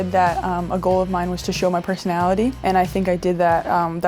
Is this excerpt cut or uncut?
cut